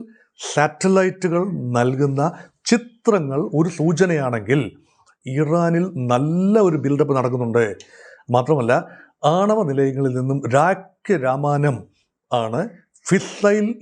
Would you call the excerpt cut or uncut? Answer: uncut